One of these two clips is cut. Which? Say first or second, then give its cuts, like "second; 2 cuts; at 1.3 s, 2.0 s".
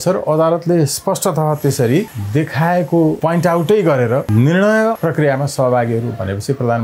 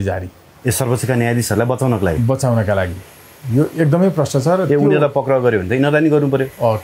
first; 4 cuts; at 2.2 s, 3.2 s, 4.3 s, 5.0 s